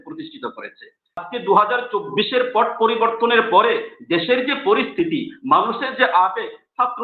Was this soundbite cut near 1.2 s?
yes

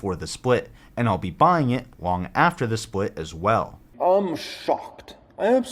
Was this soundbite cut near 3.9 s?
yes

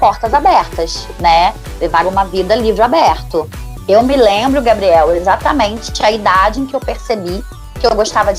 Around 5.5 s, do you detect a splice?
no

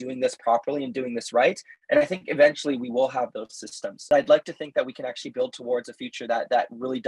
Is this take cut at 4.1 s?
yes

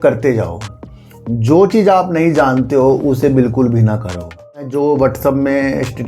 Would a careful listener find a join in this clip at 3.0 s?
no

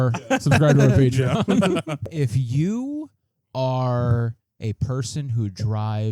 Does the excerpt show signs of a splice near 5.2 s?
no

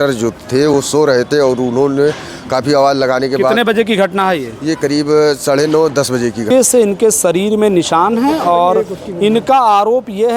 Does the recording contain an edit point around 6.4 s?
yes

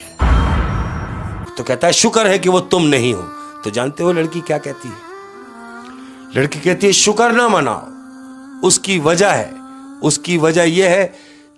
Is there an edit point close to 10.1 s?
no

